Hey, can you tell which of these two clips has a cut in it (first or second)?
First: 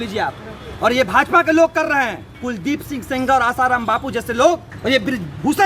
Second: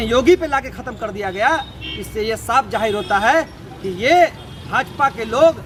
first